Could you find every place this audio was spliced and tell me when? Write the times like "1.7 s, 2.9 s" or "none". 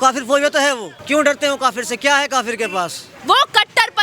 0.9 s, 3.1 s